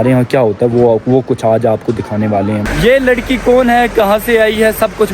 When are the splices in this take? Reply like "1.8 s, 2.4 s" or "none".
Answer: 2.6 s

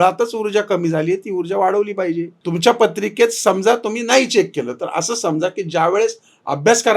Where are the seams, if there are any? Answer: 2.4 s

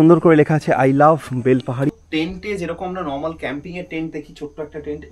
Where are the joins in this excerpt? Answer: 1.9 s

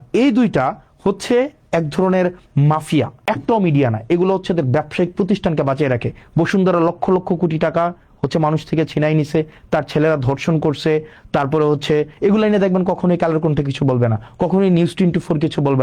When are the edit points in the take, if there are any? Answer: 3.3 s

